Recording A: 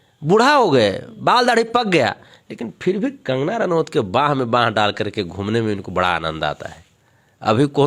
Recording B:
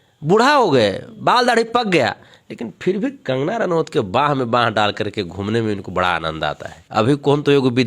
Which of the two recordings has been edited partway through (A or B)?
B